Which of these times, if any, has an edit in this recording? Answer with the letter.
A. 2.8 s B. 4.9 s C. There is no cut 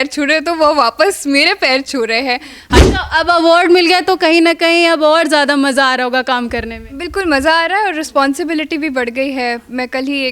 A